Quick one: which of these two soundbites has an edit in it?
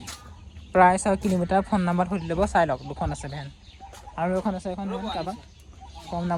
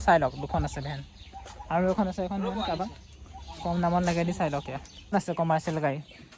second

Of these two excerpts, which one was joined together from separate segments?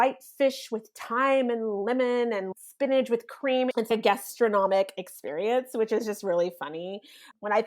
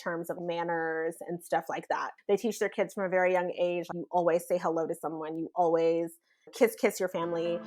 first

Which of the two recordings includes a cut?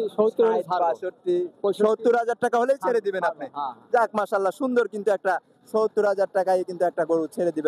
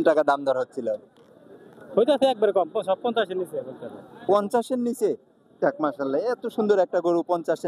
second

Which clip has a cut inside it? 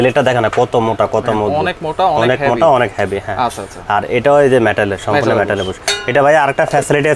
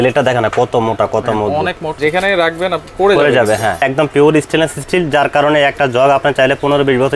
second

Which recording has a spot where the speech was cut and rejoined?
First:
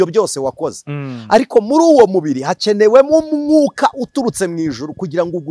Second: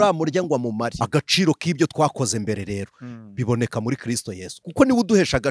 second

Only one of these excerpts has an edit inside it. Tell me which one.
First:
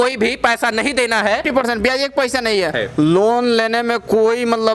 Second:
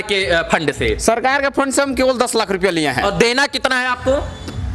first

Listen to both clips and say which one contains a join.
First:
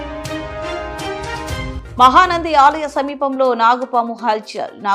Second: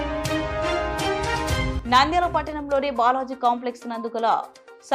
first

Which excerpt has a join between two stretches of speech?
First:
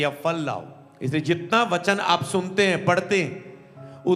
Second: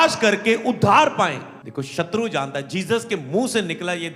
second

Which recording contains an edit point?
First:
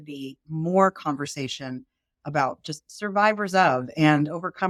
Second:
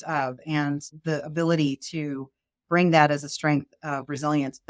second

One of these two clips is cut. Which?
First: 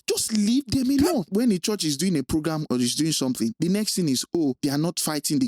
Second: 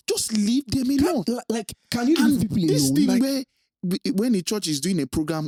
first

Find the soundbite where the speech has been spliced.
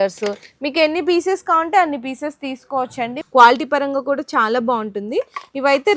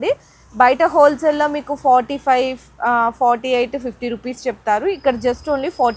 first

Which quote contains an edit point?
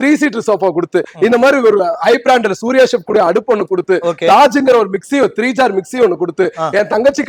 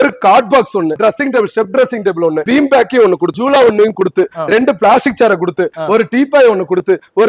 second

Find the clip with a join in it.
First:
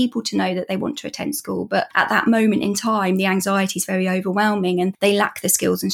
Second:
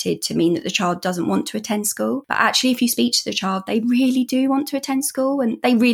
first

